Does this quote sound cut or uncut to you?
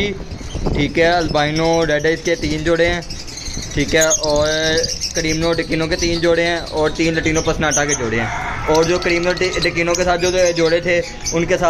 uncut